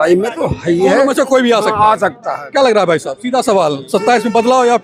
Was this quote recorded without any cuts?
yes; 0 cuts

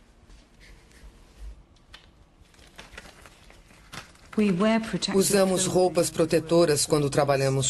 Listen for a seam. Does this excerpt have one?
yes; 1 cut; at 5.2 s

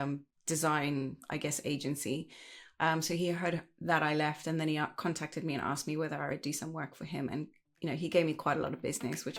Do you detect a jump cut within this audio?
no; 0 cuts

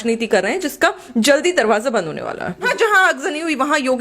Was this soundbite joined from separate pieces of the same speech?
yes; 1 cut; at 2.7 s

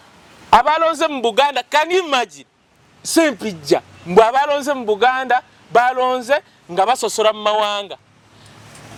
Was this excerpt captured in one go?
yes; 0 cuts

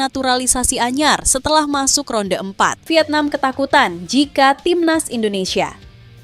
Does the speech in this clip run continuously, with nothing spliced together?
no; 1 cut; at 2.8 s

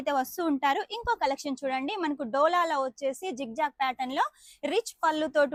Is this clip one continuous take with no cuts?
yes; 0 cuts

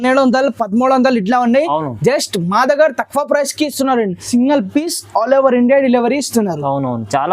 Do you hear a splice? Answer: yes; 1 cut; at 4.2 s

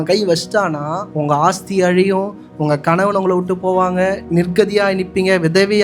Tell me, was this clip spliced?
yes; 2 cuts; at 1.0 s, 4.2 s

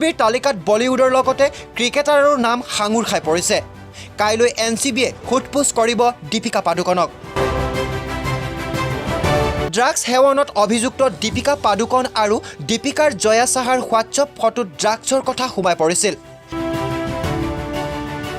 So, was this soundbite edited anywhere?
yes; 3 cuts; at 7.6 s, 9.7 s, 16.8 s

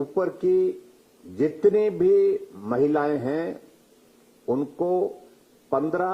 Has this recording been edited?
no; 0 cuts

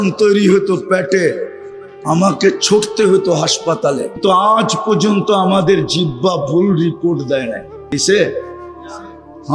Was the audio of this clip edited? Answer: yes; 2 cuts; at 4.2 s, 7.9 s

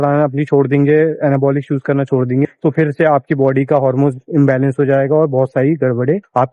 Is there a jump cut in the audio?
yes; 1 cut; at 4.1 s

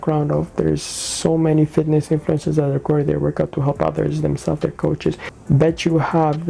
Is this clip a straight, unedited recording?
no; 1 cut; at 5.3 s

